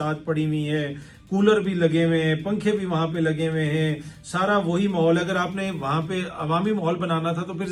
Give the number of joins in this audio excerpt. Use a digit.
0